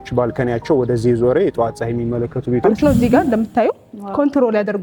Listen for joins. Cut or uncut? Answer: cut